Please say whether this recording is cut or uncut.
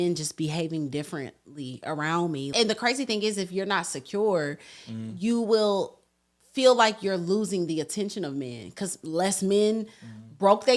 cut